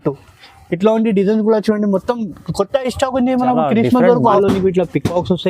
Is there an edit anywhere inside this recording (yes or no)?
yes